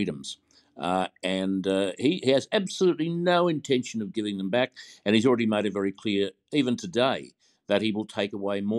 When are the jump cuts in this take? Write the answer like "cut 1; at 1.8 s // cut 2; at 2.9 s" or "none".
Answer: none